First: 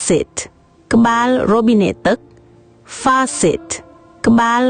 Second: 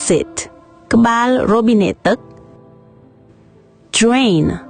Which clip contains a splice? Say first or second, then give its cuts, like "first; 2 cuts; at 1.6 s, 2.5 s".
second; 1 cut; at 2.2 s